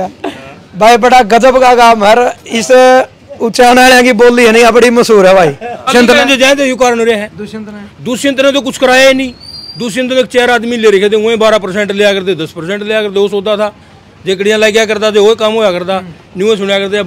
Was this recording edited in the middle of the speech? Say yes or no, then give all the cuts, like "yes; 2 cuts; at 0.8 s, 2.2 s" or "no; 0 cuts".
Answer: yes; 1 cut; at 5.7 s